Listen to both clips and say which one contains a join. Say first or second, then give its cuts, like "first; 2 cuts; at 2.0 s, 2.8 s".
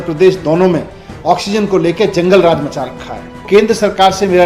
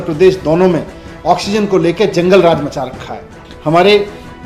first; 1 cut; at 3.4 s